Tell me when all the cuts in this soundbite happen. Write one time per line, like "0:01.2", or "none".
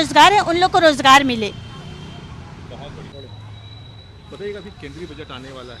none